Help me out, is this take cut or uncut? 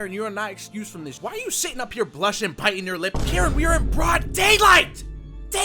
cut